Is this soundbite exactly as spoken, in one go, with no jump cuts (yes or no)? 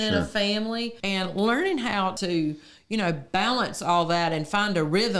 no